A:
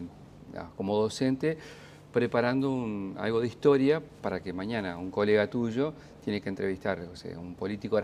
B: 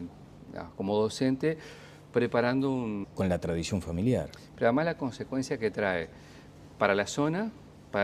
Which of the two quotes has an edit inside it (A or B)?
A